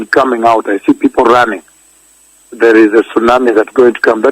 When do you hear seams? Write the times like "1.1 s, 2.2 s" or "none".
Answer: 2.2 s